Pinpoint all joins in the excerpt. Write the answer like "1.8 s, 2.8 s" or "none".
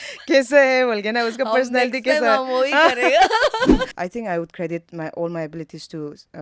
3.9 s